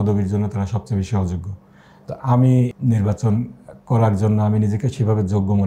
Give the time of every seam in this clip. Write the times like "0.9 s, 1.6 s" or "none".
2.7 s